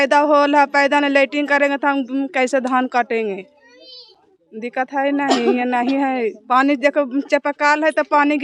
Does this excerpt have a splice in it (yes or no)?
no